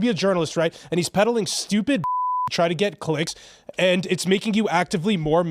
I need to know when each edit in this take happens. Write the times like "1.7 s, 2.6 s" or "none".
1.1 s, 4.5 s